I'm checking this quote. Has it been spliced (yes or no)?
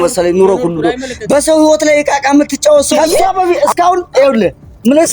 yes